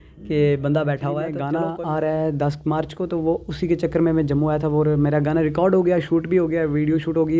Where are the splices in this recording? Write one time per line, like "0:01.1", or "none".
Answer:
0:01.3